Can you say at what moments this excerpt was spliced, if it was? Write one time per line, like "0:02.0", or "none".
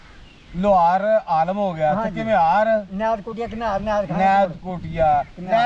none

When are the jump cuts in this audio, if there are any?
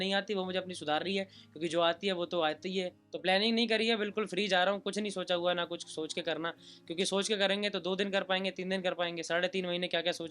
0:03.0

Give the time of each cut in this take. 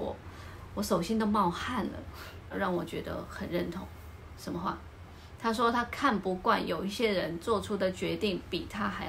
0:02.5

